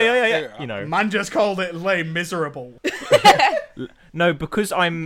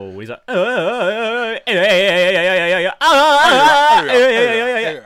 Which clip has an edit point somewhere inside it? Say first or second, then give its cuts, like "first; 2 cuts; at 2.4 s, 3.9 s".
first; 1 cut; at 2.7 s